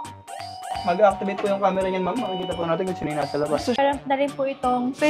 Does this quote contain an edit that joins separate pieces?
yes; 1 cut; at 3.8 s

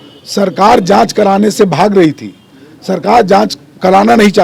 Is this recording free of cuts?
yes; 0 cuts

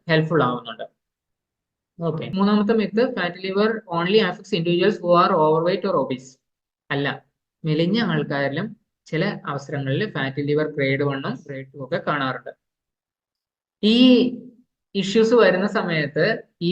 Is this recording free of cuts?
no; 1 cut; at 2.2 s

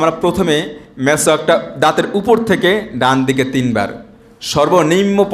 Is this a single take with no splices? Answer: yes; 0 cuts

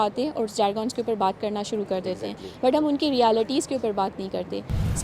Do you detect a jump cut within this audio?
no; 0 cuts

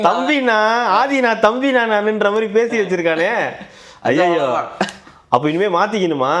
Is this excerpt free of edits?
yes; 0 cuts

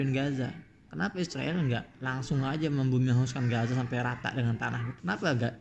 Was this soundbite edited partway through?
no; 0 cuts

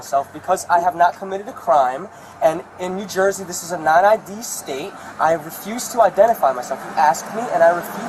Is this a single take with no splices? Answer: yes; 0 cuts

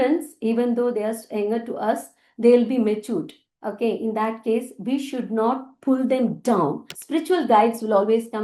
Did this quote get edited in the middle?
yes; 1 cut; at 6.9 s

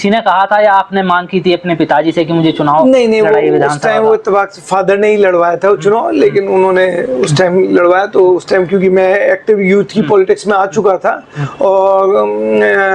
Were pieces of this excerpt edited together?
no; 0 cuts

